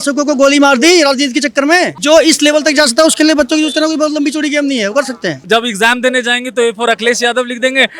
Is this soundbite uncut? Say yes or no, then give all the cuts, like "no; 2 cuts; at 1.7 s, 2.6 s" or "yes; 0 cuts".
no; 2 cuts; at 2.0 s, 5.4 s